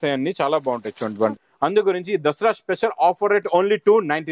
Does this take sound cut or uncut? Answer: cut